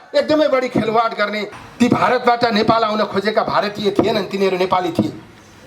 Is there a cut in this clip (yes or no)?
yes